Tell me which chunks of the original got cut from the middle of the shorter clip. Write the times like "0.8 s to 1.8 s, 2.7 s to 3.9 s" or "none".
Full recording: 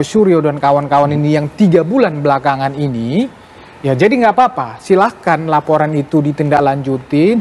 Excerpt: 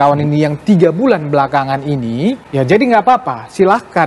3.4 s to 3.7 s